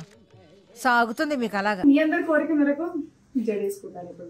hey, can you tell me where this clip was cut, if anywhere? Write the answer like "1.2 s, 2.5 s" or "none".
1.8 s